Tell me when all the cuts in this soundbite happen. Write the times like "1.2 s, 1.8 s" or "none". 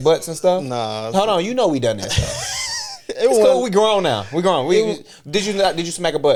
none